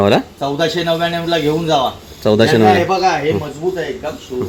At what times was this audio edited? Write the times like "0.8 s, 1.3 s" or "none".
none

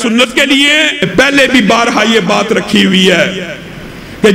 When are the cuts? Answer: 1.1 s

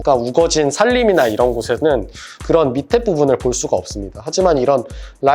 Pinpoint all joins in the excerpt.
2.3 s

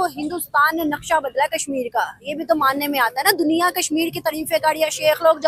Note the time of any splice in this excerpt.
none

